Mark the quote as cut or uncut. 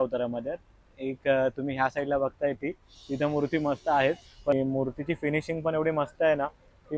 cut